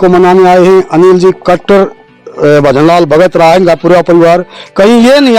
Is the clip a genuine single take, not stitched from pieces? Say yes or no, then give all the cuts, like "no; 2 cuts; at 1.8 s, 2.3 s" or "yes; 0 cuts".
yes; 0 cuts